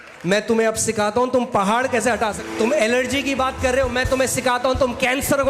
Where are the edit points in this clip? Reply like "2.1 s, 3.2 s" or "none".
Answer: 2.4 s